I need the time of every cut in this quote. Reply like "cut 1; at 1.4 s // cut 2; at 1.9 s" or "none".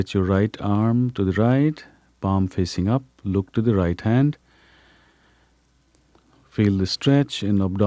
none